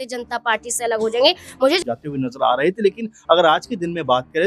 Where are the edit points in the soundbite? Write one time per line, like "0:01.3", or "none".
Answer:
0:01.8